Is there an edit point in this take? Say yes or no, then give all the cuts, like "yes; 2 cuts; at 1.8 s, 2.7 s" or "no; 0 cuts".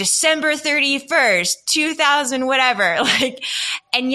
no; 0 cuts